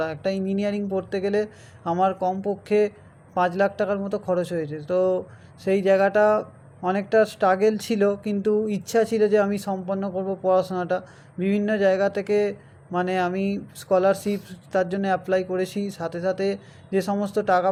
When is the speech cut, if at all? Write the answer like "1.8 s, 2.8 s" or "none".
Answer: none